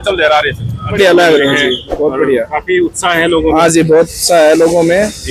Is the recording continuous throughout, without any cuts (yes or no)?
no